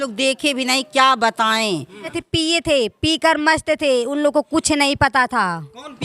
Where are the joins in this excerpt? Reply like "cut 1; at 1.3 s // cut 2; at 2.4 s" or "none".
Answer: cut 1; at 2.1 s